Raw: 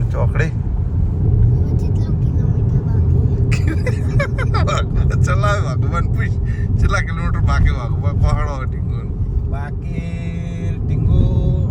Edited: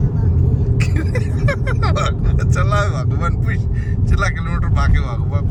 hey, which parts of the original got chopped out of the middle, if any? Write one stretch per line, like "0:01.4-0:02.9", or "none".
none